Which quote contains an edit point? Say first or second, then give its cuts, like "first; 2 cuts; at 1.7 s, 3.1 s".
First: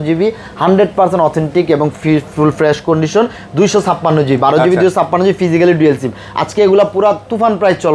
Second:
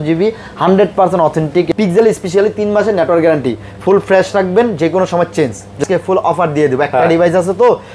second; 2 cuts; at 1.7 s, 5.8 s